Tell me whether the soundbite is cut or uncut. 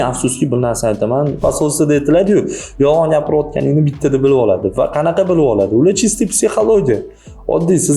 cut